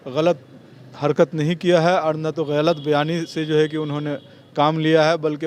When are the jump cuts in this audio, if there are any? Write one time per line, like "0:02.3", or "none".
none